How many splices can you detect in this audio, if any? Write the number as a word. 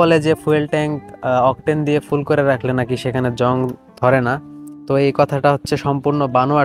zero